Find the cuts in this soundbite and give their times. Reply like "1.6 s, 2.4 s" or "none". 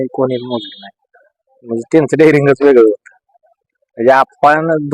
none